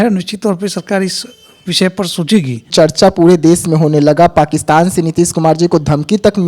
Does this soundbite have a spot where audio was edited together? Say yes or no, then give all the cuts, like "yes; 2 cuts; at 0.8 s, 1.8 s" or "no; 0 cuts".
yes; 1 cut; at 2.7 s